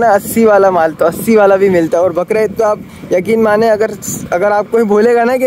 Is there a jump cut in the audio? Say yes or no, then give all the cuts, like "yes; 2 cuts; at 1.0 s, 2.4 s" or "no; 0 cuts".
no; 0 cuts